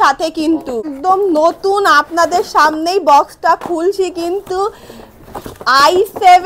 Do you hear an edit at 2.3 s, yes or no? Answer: no